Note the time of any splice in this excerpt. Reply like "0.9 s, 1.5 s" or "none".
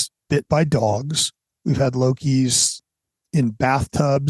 none